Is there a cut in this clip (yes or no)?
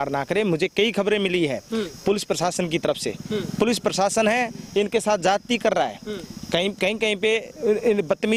no